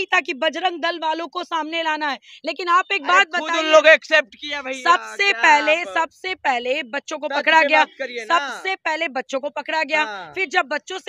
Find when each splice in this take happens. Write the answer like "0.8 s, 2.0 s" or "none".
none

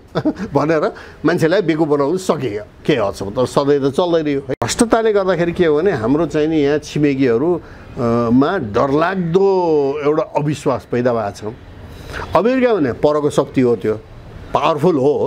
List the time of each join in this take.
none

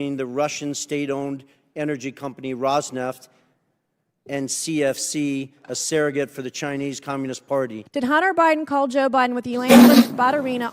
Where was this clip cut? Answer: 7.8 s

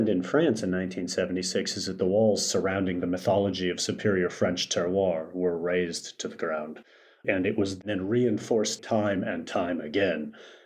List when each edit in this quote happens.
7.8 s, 8.8 s

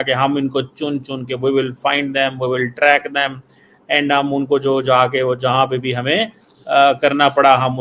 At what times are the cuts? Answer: none

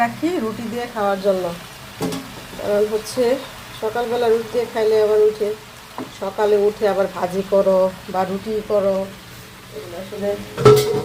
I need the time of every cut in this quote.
none

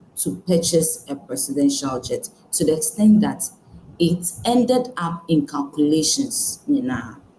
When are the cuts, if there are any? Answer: none

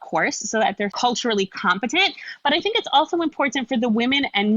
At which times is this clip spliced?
0.9 s

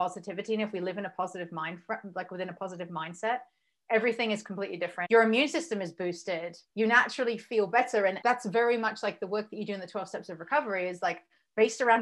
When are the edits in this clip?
5.0 s, 6.6 s, 8.2 s

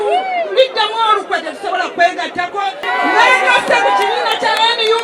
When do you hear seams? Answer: 2.8 s

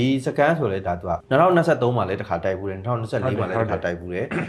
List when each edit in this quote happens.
1.2 s

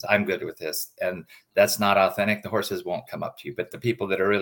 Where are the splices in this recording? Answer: none

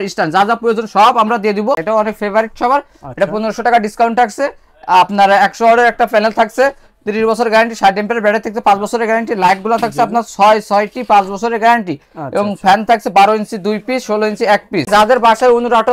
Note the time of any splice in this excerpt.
1.8 s, 14.9 s

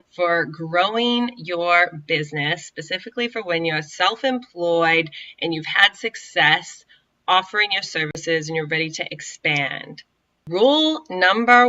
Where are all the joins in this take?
10.4 s

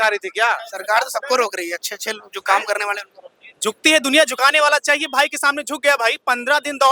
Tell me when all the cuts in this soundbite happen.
none

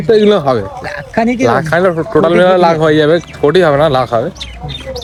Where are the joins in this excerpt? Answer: none

